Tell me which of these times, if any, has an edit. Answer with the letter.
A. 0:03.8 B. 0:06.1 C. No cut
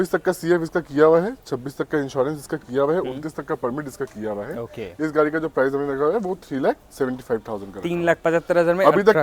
C